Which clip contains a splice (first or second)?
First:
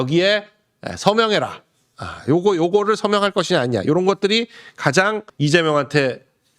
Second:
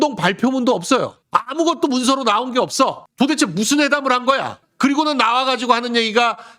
first